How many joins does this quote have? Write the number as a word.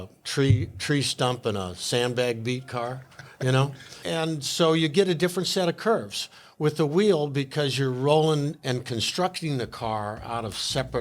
one